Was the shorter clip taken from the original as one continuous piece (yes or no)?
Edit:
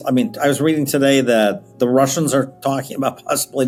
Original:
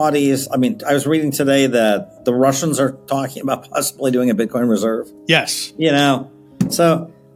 yes